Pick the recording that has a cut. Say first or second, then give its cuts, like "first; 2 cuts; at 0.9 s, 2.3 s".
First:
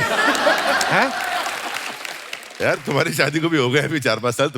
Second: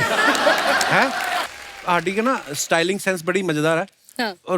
second; 1 cut; at 1.5 s